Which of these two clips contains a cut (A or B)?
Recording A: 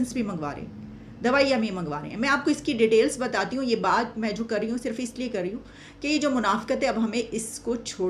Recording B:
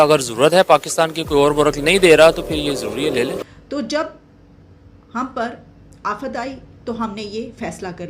B